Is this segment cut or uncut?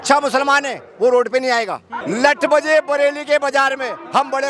cut